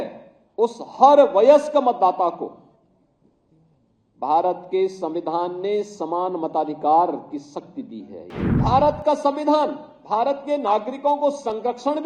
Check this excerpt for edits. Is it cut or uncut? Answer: cut